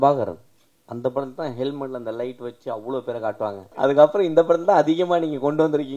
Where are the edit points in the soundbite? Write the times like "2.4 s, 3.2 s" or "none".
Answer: 3.7 s